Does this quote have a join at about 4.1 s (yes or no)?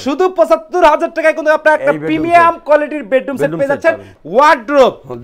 yes